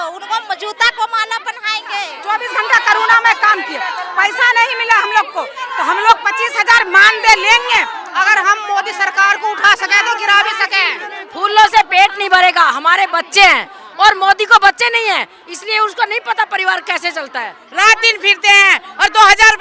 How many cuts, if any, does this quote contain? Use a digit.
4